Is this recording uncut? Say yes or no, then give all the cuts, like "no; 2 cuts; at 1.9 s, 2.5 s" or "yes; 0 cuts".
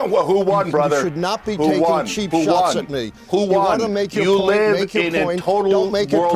no; 1 cut; at 3.4 s